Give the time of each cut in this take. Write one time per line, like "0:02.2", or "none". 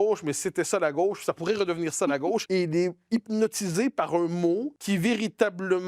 0:02.4
0:04.7

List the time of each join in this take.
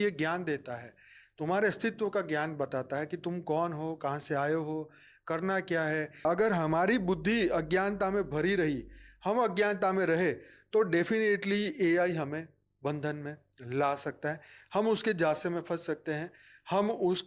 0:06.2

